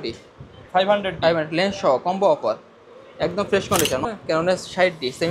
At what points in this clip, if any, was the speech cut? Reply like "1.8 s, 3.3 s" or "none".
4.0 s